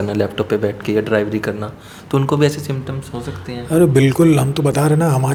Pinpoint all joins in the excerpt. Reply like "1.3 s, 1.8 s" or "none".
none